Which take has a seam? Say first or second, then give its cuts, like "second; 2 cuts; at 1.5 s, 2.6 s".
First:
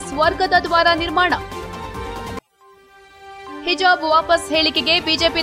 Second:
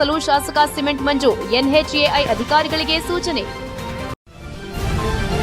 second; 1 cut; at 4.3 s